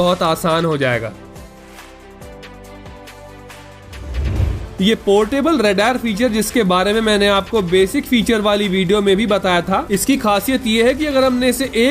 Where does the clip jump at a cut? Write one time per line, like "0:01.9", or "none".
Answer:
none